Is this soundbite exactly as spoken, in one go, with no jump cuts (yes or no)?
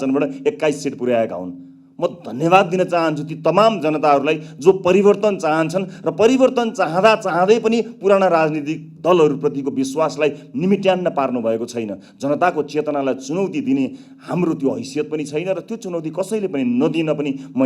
yes